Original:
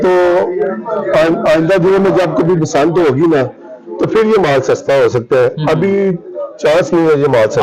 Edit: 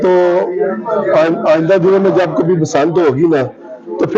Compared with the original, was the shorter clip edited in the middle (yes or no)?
no